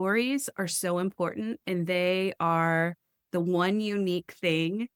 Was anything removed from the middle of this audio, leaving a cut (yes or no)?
no